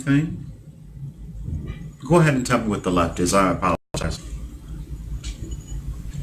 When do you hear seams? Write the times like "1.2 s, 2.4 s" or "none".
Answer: none